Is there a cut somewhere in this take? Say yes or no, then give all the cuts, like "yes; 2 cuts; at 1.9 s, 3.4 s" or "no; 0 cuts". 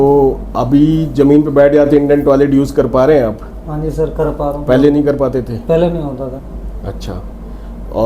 yes; 1 cut; at 6.3 s